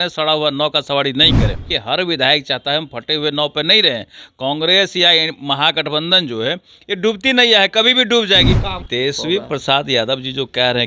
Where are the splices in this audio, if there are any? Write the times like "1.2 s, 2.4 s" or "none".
1.7 s, 8.8 s